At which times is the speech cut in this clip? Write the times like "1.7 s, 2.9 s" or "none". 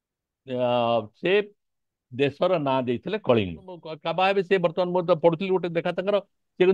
3.9 s

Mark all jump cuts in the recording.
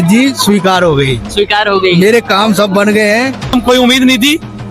3.5 s

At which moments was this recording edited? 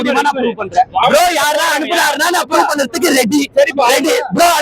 1.0 s

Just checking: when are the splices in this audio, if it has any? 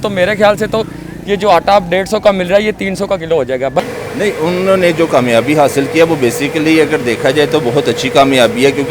3.8 s

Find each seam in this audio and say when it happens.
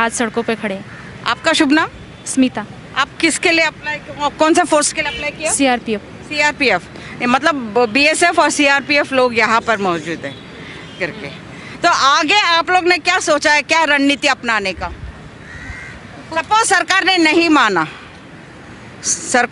none

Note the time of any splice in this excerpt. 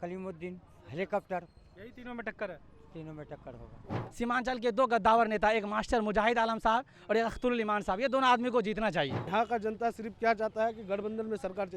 4.0 s, 9.3 s

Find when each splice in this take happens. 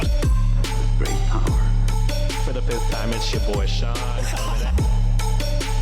none

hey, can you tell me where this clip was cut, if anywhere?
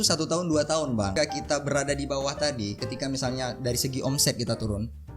1.1 s

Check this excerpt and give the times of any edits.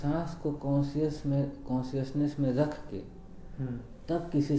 none

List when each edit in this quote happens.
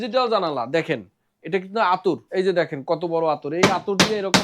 2.2 s

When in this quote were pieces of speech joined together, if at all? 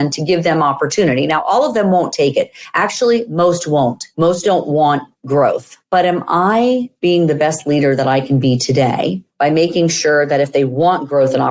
none

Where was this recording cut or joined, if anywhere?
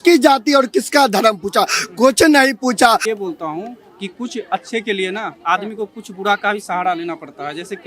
3.0 s

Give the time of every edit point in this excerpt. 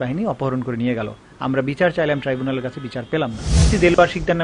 3.5 s

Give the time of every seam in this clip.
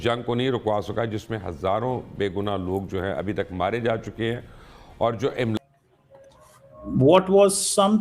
5.6 s

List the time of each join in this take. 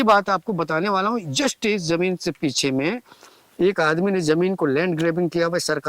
none

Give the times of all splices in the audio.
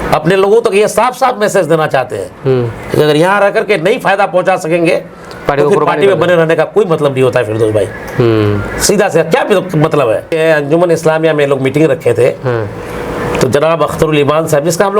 10.3 s

